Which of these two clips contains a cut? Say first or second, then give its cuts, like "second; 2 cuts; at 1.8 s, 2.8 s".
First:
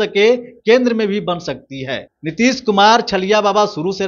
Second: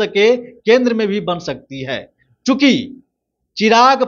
first; 1 cut; at 2.2 s